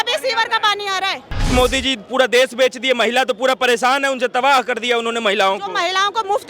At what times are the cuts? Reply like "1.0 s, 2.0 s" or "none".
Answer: 1.5 s